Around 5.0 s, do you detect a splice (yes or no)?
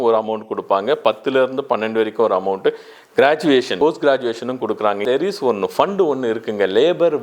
yes